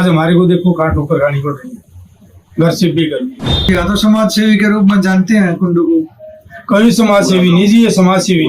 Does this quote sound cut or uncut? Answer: cut